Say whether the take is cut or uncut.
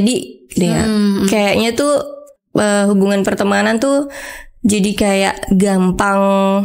uncut